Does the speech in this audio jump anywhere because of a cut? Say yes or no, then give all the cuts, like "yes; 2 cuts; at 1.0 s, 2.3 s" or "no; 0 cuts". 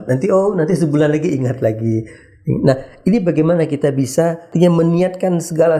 yes; 1 cut; at 4.5 s